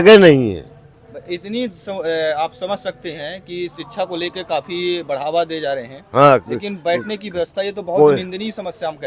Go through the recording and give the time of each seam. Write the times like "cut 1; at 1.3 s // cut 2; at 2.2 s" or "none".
none